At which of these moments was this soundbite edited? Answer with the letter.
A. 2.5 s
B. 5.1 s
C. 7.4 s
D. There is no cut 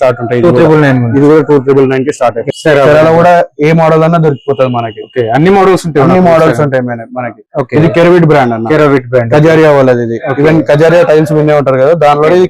A